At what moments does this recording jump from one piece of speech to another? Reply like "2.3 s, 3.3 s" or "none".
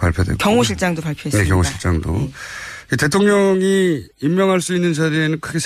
2.0 s